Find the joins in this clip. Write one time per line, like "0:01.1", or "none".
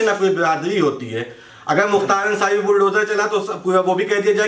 none